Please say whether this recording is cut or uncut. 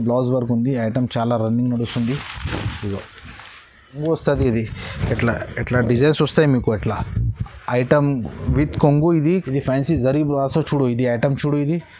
cut